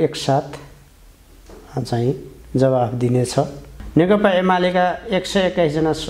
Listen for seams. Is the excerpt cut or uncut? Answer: cut